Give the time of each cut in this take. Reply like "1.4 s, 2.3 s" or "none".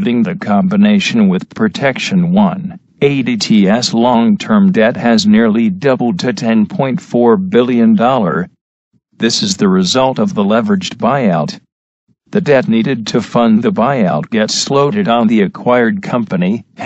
none

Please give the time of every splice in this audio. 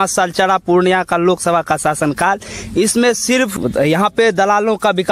3.5 s

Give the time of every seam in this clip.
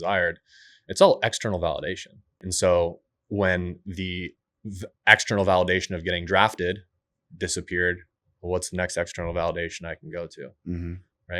2.5 s

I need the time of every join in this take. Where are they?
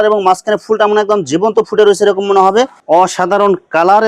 2.8 s

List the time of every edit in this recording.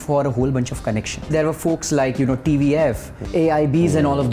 1.3 s, 3.3 s

